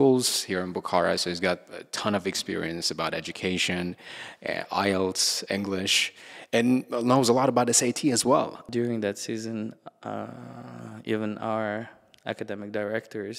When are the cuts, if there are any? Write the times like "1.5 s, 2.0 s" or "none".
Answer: 8.6 s